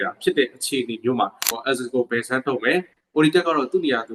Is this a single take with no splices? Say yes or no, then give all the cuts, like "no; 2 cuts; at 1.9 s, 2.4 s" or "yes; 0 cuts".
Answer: no; 1 cut; at 1.6 s